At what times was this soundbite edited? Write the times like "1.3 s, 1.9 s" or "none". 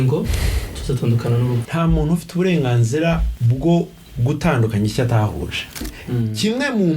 1.6 s, 3.3 s, 5.8 s

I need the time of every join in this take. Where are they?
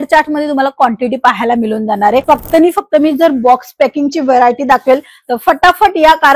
2.2 s

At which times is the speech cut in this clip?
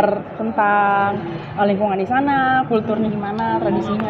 none

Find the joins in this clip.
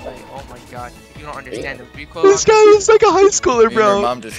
none

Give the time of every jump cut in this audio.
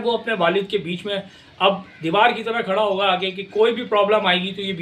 none

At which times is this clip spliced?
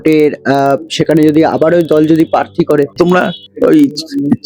3.0 s

